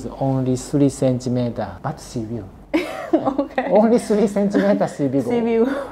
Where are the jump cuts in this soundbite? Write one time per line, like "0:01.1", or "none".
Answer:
none